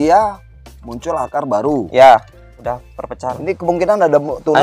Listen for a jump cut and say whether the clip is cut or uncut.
cut